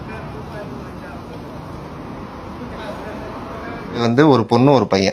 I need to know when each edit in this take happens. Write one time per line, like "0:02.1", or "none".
0:04.0